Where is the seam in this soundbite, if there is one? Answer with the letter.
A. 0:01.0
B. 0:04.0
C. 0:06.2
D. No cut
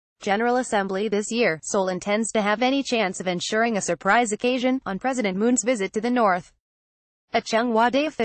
A